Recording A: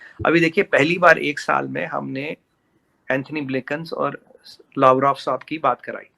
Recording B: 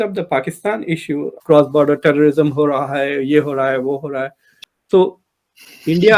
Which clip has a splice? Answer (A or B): B